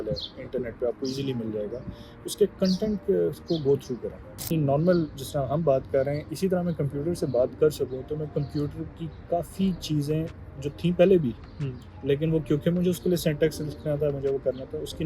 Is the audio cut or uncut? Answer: cut